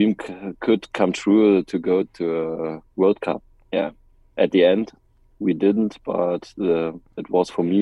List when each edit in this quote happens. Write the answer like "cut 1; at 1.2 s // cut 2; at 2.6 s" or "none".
cut 1; at 2.1 s